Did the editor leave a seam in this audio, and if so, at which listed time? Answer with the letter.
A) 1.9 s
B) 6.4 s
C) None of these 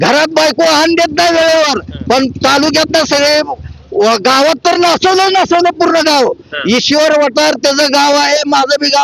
C